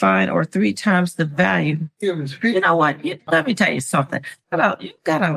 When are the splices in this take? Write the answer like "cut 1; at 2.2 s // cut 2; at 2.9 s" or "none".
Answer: none